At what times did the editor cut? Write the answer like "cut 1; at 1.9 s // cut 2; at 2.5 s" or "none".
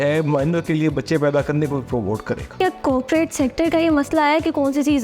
cut 1; at 2.6 s